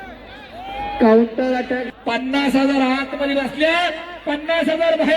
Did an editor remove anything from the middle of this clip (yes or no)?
yes